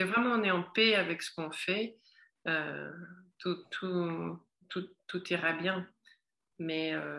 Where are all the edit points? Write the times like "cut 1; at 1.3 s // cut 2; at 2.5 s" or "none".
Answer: none